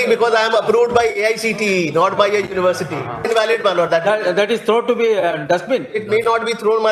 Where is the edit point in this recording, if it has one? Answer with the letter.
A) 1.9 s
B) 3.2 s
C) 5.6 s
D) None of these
B